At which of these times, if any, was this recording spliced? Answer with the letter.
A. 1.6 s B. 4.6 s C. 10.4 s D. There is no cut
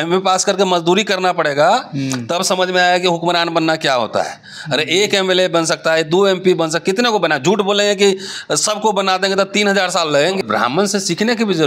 C